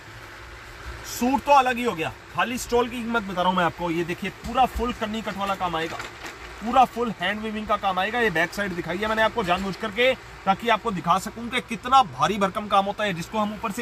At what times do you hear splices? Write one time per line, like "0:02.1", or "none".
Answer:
none